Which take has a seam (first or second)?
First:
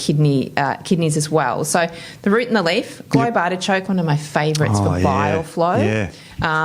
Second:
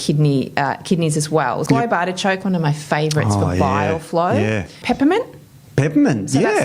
second